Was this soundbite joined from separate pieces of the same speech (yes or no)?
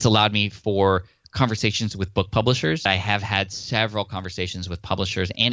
yes